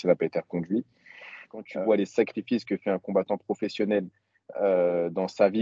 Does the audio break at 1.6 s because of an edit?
yes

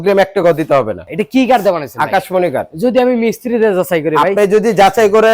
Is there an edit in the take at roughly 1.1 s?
yes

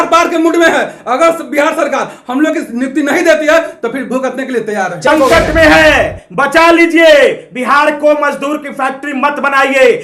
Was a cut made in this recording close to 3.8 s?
no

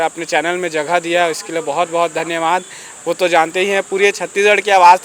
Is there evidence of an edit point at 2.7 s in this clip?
no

